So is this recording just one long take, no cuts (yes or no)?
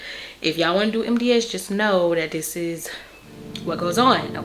yes